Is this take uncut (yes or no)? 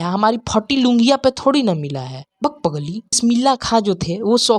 no